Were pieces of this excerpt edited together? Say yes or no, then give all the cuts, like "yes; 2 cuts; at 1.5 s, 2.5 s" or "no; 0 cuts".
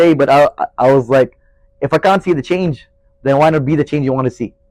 no; 0 cuts